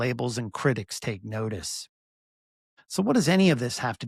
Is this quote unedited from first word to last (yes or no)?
yes